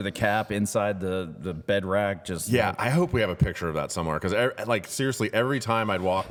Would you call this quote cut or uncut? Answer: uncut